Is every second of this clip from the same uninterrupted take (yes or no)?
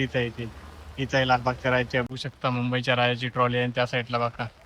no